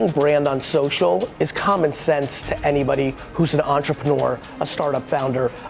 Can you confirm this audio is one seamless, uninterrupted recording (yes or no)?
yes